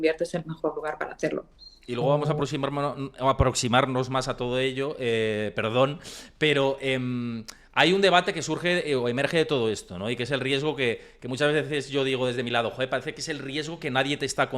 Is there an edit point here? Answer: no; 0 cuts

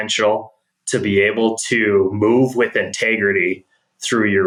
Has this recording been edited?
no; 0 cuts

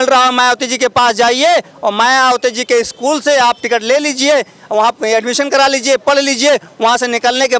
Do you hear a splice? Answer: no; 0 cuts

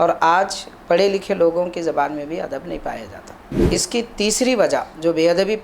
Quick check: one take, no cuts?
no; 1 cut; at 3.5 s

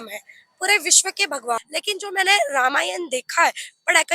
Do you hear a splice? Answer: yes; 1 cut; at 1.6 s

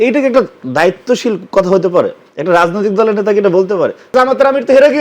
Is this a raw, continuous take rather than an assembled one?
no; 1 cut; at 4.1 s

